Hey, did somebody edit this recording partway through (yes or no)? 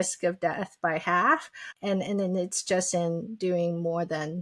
yes